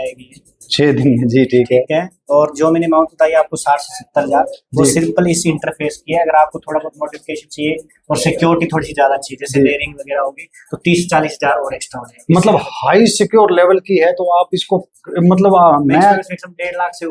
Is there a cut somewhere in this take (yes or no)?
no